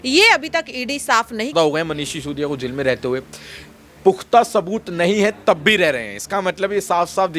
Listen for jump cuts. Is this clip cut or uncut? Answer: cut